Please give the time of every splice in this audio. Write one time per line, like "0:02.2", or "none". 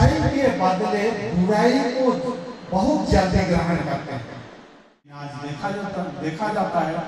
0:05.2